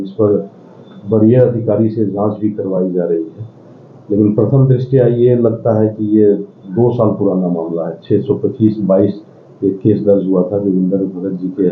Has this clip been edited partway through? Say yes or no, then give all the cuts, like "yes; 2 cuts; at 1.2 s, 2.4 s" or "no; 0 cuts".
no; 0 cuts